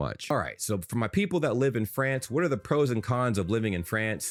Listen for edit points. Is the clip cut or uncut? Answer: uncut